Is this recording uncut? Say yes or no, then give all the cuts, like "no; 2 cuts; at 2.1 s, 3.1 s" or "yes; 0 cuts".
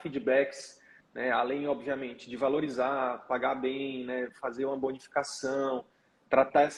yes; 0 cuts